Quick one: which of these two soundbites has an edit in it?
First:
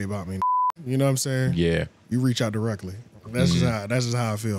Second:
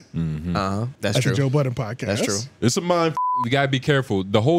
second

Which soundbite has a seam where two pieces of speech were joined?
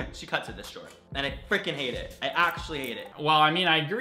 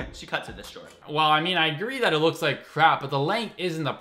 second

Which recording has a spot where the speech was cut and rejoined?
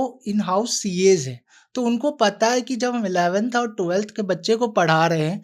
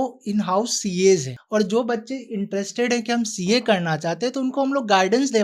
second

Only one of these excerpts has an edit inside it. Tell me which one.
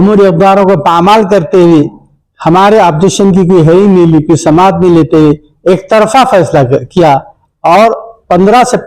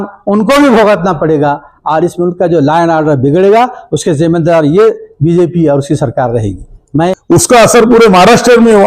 second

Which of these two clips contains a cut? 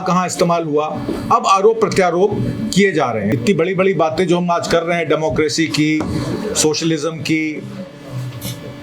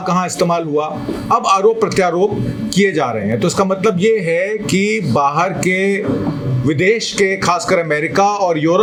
first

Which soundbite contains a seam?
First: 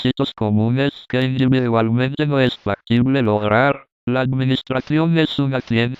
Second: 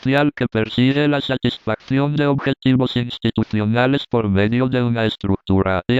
first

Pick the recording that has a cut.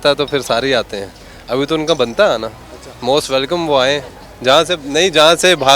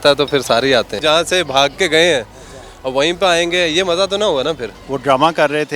second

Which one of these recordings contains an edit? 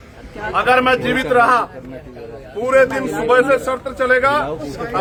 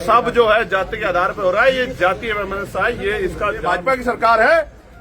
second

